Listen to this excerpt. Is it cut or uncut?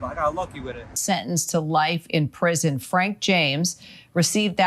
cut